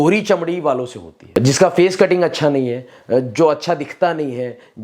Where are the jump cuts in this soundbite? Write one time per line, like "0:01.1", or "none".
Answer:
0:01.4